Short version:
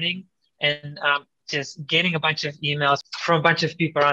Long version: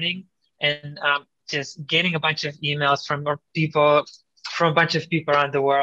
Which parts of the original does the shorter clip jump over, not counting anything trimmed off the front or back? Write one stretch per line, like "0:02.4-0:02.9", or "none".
0:03.1-0:04.4